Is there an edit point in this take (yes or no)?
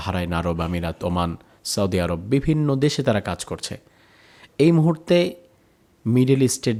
no